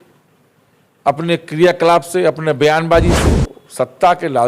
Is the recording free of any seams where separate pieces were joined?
no; 1 cut; at 3.2 s

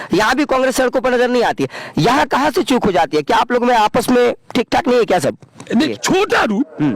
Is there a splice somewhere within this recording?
yes; 1 cut; at 5.8 s

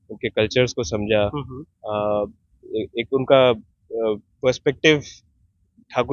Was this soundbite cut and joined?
no; 0 cuts

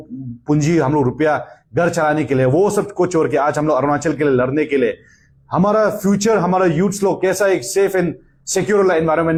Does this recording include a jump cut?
no; 0 cuts

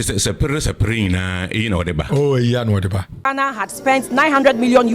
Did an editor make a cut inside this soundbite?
yes; 1 cut; at 3.2 s

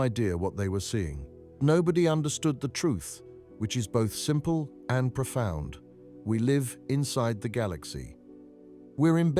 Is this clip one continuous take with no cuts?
no; 1 cut; at 1.6 s

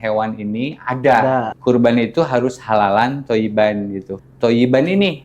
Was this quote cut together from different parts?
yes; 2 cuts; at 1.5 s, 4.2 s

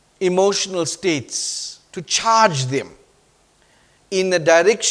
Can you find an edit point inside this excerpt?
no; 0 cuts

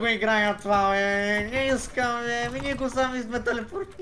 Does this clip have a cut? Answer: no; 0 cuts

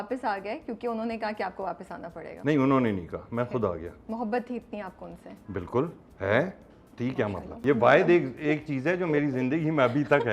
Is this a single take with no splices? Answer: no; 2 cuts; at 2.3 s, 7.6 s

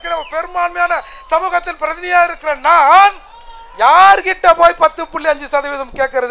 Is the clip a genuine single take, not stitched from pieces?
yes; 0 cuts

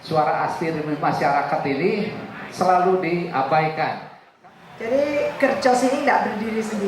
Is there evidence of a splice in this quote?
yes; 1 cut; at 4.3 s

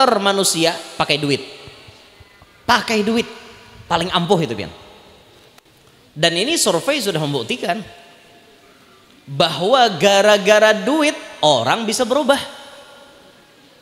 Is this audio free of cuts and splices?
yes; 0 cuts

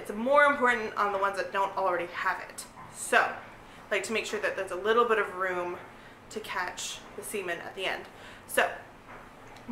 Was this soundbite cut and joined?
no; 0 cuts

